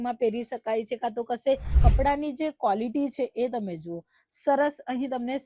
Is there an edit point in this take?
yes; 1 cut; at 1.7 s

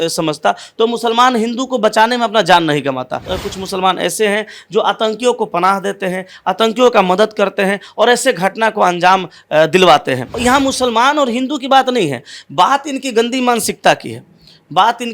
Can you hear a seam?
yes; 2 cuts; at 3.3 s, 10.3 s

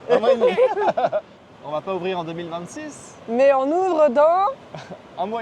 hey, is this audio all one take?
no; 1 cut; at 1.4 s

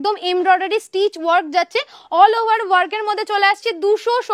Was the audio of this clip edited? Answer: no; 0 cuts

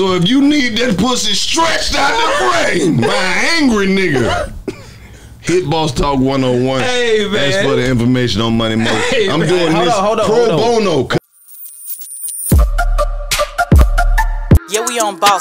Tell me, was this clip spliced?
yes; 1 cut; at 11.2 s

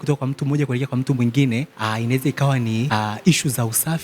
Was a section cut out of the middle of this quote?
yes; 2 cuts; at 1.7 s, 2.9 s

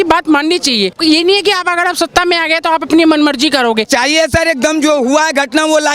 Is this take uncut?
no; 2 cuts; at 1.0 s, 3.9 s

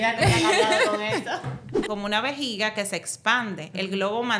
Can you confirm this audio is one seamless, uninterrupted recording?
no; 1 cut; at 1.8 s

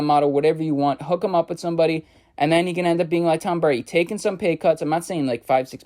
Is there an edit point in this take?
no; 0 cuts

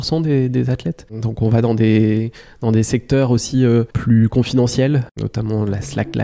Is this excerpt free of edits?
no; 3 cuts; at 1.2 s, 3.9 s, 5.1 s

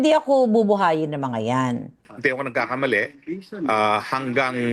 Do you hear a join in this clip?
yes; 1 cut; at 2.0 s

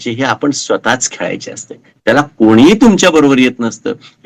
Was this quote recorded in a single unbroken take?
yes; 0 cuts

